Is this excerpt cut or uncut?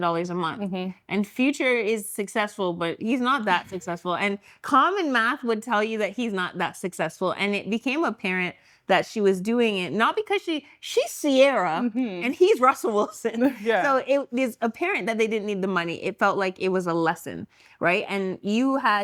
uncut